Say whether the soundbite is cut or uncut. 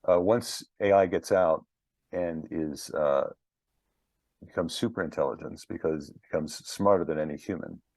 uncut